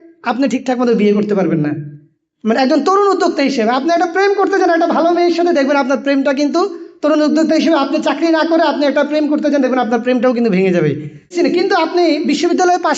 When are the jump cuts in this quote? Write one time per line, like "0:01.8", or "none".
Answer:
0:11.3